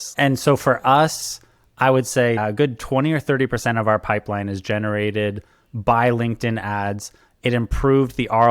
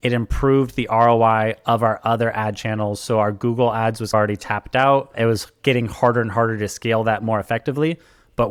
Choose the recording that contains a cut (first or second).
first